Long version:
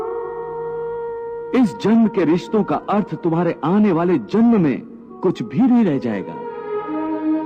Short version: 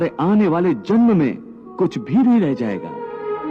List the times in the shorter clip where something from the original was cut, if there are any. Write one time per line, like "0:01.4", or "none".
none